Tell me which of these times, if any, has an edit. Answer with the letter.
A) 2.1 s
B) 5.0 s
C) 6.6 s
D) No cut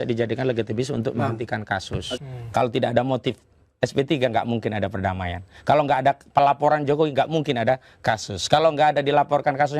A